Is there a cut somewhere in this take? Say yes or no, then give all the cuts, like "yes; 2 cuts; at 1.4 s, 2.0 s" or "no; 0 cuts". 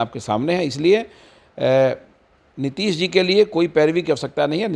no; 0 cuts